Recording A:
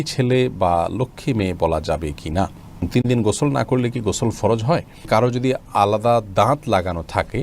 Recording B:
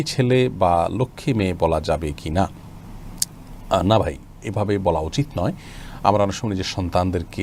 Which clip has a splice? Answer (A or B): A